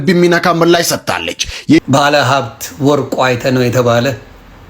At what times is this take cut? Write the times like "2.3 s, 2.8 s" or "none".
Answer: 1.8 s